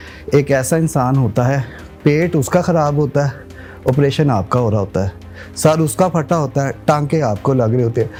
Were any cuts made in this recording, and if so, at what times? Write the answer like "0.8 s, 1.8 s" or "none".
none